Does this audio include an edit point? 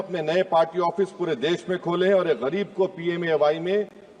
no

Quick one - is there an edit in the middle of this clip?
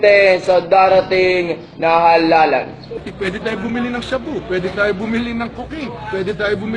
yes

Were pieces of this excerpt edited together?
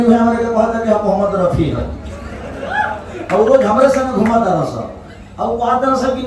no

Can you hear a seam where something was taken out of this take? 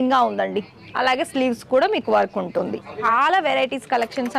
yes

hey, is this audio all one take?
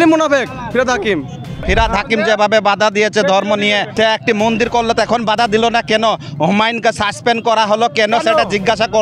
no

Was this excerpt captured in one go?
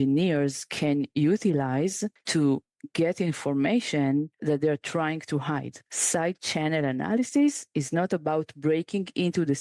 no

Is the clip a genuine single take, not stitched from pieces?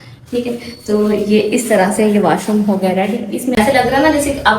no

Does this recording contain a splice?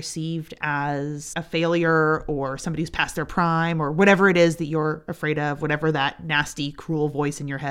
yes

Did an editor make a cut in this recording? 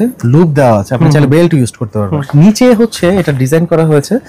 yes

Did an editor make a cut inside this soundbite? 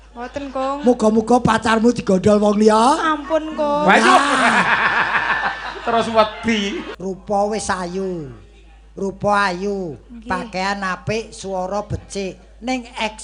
yes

